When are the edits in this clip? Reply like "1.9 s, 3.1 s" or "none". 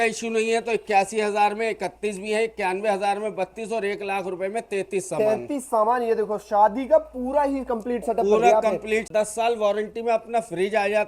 9.1 s